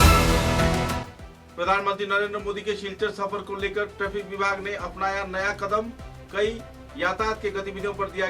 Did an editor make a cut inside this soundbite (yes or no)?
yes